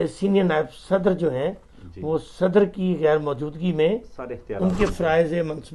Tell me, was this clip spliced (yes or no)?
no